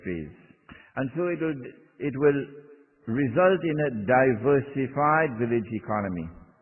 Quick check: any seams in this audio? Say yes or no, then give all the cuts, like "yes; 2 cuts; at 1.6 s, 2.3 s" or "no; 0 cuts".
yes; 1 cut; at 1.1 s